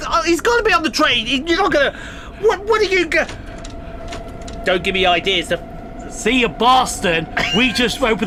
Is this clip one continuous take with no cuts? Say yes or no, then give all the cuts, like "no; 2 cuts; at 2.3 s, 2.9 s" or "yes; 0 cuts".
yes; 0 cuts